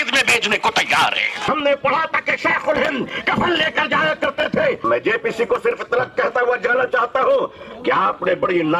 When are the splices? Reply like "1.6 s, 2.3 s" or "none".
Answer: 1.3 s, 4.8 s